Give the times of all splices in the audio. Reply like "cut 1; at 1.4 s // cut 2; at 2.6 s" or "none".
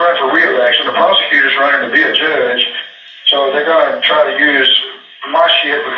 none